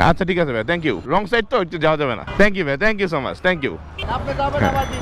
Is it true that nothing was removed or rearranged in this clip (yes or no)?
no